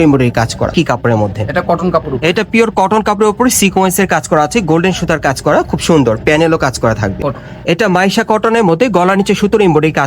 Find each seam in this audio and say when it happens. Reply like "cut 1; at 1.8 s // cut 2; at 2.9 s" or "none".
cut 1; at 0.7 s // cut 2; at 7.2 s

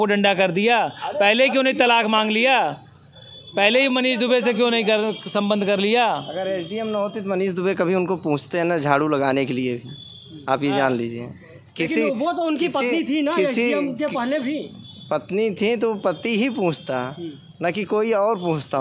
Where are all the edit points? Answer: none

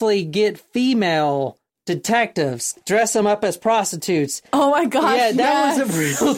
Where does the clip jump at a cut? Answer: cut 1; at 1.7 s // cut 2; at 2.8 s

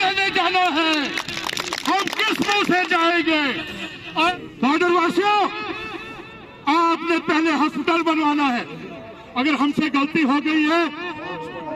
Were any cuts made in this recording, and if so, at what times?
cut 1; at 4.3 s

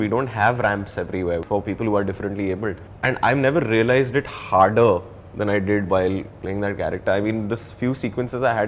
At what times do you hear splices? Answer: cut 1; at 1.4 s // cut 2; at 2.9 s

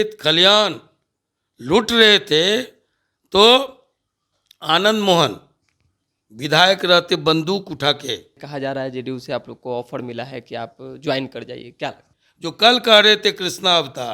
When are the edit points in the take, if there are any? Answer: cut 1; at 8.5 s // cut 2; at 12.0 s

